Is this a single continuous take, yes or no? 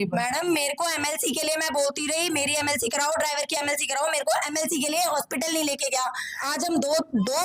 no